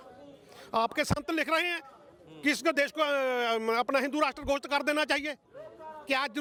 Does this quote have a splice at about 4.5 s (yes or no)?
no